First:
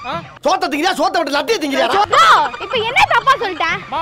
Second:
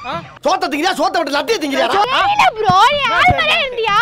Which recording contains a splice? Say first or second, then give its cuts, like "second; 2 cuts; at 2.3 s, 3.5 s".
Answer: second; 1 cut; at 2.1 s